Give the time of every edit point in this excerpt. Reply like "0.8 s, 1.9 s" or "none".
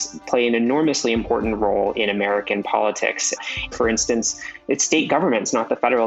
3.7 s